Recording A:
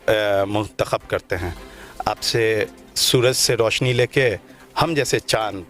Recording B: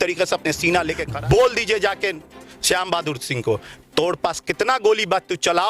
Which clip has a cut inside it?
B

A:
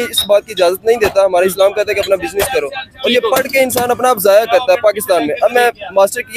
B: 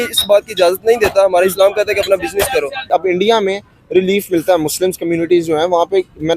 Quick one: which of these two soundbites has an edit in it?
B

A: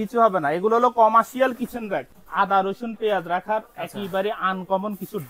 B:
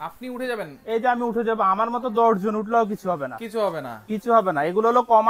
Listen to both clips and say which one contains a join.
A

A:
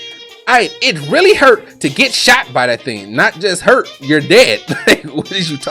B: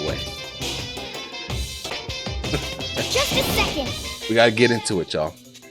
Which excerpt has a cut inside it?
B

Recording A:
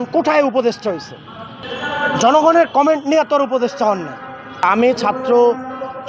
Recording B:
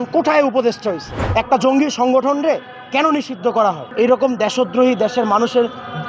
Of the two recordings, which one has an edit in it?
B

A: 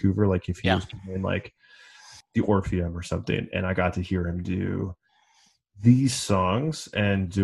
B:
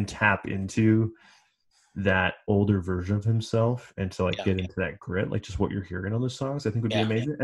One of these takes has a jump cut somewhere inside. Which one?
A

